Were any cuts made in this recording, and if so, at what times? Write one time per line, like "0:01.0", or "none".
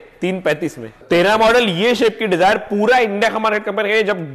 0:00.9